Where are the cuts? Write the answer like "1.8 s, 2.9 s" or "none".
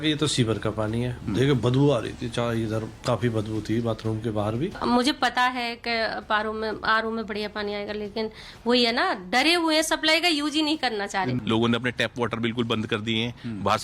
4.8 s, 11.4 s

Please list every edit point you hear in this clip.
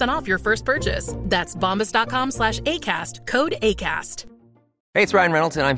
4.7 s

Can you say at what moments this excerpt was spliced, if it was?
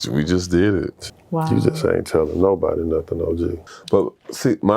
1.0 s, 3.6 s

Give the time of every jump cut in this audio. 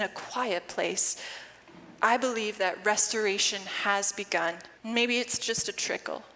4.7 s

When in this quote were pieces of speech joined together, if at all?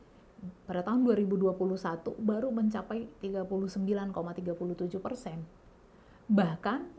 none

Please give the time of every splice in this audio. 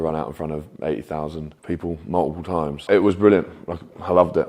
1.5 s, 2.8 s

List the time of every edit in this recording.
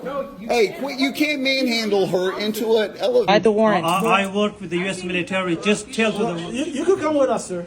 3.3 s

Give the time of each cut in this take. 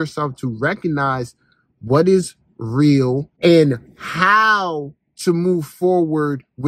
3.3 s

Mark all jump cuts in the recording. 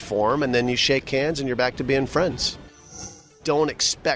3.2 s

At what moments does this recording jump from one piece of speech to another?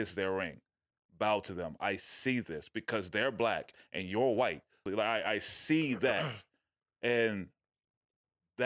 4.8 s

